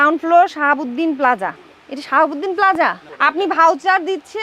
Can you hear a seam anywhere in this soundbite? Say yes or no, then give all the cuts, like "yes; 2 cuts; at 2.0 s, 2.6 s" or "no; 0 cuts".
yes; 1 cut; at 3.1 s